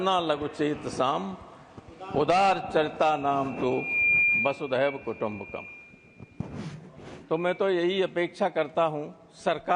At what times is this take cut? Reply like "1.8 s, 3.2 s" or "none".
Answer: none